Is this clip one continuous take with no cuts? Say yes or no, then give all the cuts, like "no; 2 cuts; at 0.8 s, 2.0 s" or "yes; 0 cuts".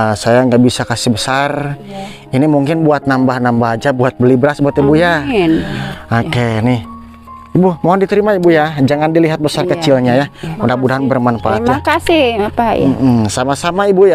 yes; 0 cuts